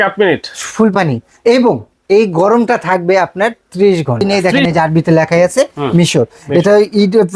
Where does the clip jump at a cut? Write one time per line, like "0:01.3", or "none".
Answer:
0:04.5